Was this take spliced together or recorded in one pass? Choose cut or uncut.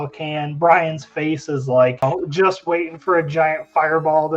cut